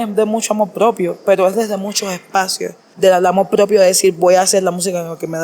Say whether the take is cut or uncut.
cut